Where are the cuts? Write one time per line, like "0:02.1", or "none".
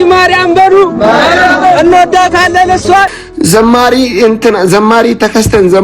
0:03.1